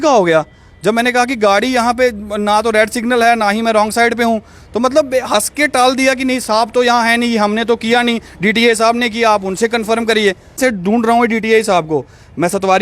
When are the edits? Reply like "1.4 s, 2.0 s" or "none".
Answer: 10.6 s